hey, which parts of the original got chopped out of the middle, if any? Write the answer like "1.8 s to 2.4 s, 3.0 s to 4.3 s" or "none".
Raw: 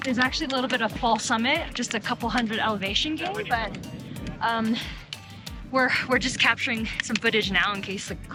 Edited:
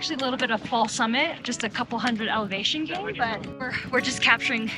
4.1 s to 6.0 s